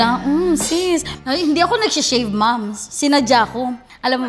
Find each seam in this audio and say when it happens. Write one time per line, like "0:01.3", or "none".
0:01.1